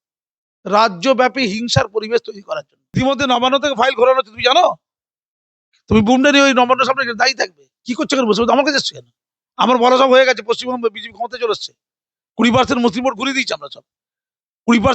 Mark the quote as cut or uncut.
cut